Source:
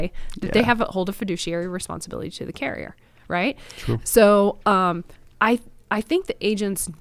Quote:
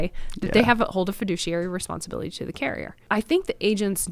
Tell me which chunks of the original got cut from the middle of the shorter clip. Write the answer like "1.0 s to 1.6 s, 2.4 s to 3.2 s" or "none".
2.9 s to 5.7 s